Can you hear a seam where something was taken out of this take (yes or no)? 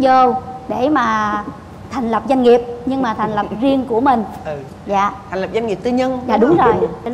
no